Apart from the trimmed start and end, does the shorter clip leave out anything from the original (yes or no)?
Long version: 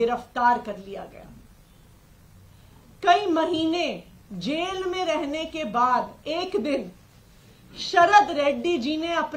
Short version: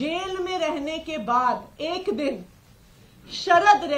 no